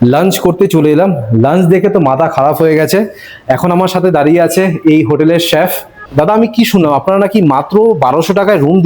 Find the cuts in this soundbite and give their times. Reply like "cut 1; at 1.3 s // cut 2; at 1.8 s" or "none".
cut 1; at 5.9 s